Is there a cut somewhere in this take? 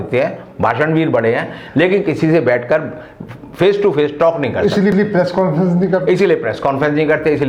no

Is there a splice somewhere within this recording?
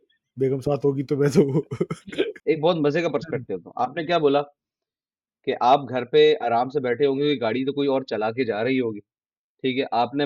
yes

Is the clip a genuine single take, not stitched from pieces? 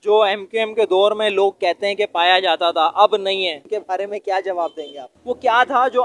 no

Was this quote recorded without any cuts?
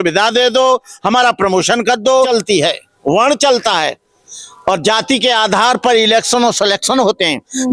no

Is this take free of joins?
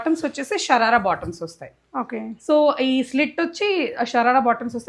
yes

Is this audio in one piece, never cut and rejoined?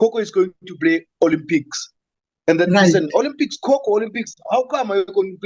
yes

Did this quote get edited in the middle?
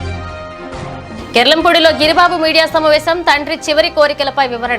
yes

